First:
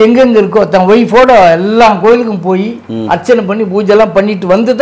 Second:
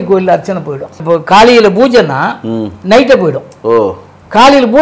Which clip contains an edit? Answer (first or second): second